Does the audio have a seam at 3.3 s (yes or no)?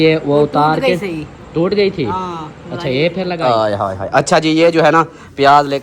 yes